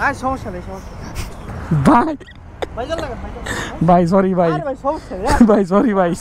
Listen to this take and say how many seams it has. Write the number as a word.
one